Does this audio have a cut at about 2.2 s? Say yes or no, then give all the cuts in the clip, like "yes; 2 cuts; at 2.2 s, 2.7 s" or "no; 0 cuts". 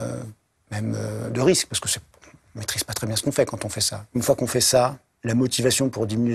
no; 2 cuts; at 4.0 s, 5.1 s